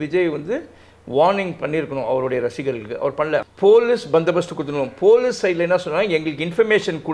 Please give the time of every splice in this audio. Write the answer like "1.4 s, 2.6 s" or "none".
3.4 s